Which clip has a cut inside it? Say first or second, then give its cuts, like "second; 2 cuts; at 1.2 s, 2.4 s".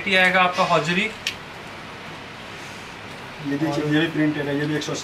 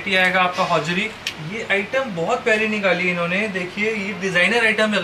second; 1 cut; at 1.4 s